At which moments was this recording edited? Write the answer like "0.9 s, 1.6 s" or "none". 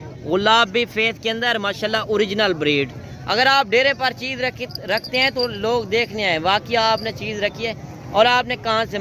none